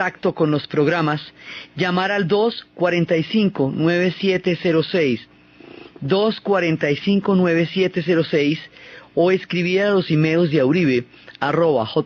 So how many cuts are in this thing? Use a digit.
0